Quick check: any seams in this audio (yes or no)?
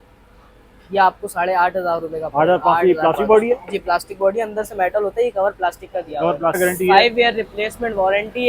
yes